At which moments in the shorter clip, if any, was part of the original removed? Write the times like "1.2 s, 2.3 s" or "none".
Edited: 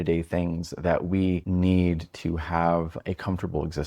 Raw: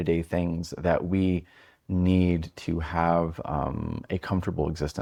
1.4 s, 3.0 s